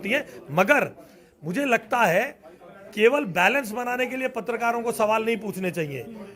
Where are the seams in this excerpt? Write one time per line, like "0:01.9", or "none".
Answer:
none